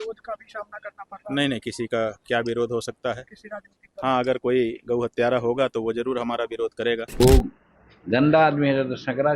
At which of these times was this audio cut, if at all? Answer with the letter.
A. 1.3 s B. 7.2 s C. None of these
B